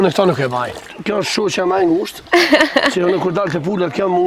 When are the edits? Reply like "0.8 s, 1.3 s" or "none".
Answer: 0.9 s